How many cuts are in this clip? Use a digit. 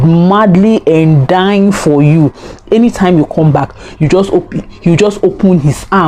0